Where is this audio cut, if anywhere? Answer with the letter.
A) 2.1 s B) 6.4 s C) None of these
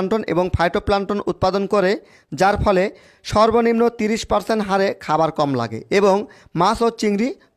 C